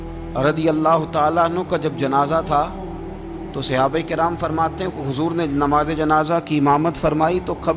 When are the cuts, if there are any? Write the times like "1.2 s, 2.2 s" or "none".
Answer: none